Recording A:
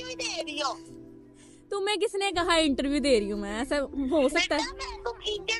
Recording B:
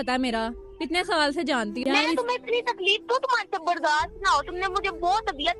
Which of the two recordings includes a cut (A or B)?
B